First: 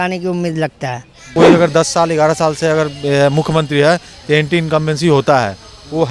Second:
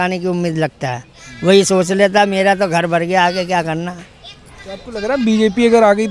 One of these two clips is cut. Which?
first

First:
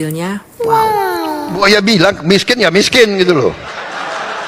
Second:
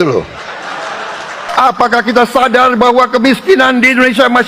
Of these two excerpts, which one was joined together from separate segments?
first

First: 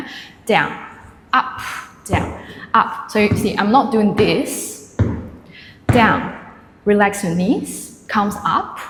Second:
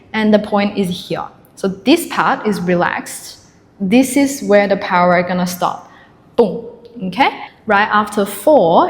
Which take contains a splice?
second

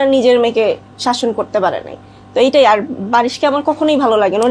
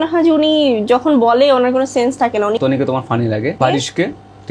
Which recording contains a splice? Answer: second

